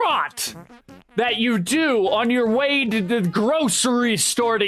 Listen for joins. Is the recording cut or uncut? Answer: uncut